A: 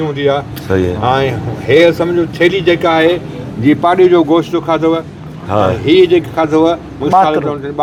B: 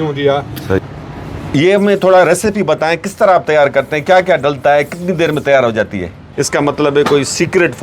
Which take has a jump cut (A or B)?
B